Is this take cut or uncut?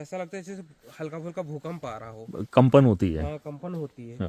uncut